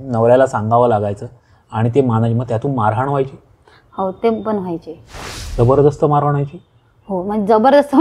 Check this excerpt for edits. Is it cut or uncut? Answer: uncut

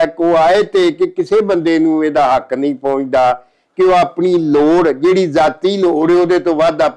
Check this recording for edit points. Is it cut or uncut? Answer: uncut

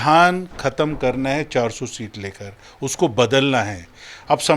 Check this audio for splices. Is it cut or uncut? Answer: uncut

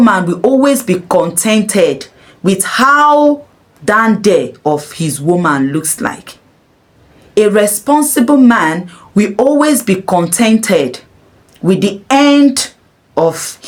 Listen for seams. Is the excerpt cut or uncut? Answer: uncut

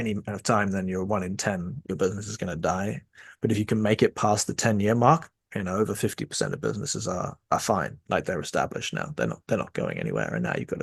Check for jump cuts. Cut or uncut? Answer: uncut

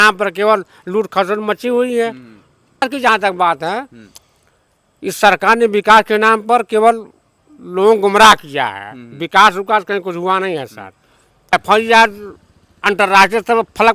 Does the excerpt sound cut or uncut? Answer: cut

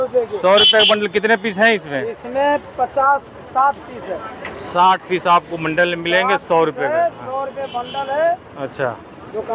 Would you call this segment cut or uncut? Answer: uncut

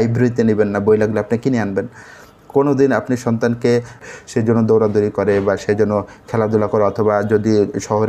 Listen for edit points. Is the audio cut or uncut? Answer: cut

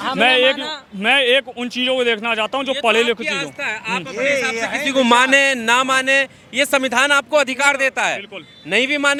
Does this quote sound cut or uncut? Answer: uncut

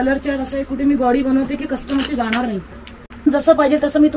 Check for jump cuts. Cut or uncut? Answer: cut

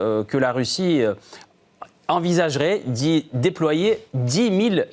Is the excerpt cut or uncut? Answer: uncut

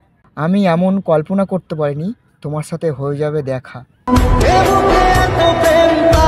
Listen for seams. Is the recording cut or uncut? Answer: uncut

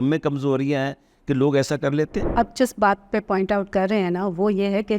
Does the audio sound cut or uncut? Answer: cut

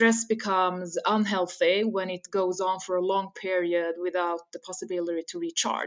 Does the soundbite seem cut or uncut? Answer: uncut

